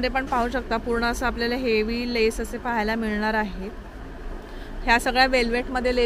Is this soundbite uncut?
yes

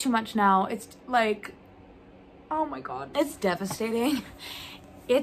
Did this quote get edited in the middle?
yes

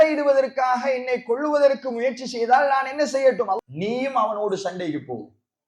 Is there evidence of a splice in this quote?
yes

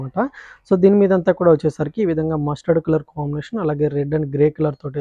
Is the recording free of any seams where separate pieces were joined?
yes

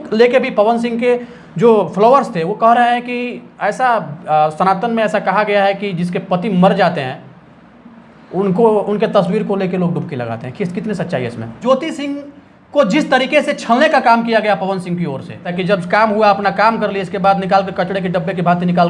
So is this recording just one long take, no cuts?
no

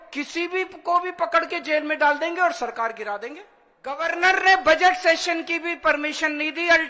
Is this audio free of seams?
no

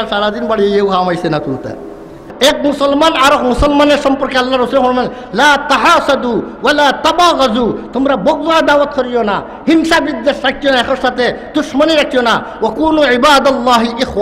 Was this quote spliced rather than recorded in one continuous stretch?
yes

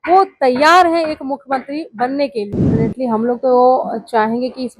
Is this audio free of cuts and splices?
no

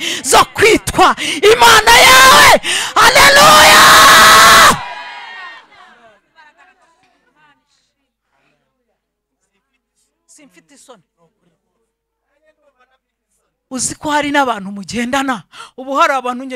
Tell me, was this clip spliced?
yes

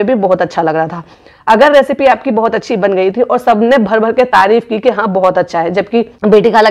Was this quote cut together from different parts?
no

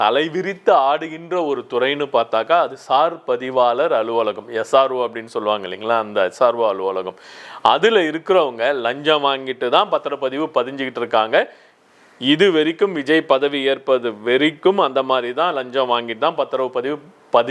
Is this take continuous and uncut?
yes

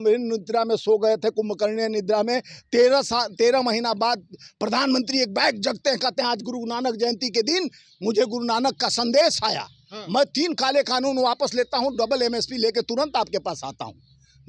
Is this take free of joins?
yes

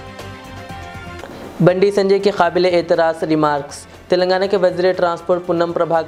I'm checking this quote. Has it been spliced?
no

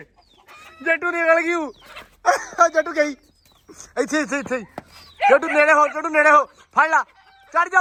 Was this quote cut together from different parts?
no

